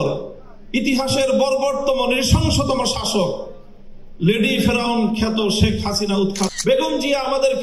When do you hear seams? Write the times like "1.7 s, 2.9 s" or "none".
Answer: 6.5 s